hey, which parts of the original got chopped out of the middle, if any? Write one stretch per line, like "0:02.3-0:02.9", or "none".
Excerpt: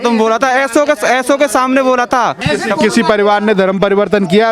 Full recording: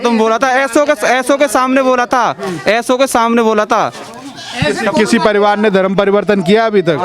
0:02.4-0:04.5